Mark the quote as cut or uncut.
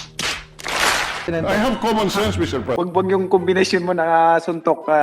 cut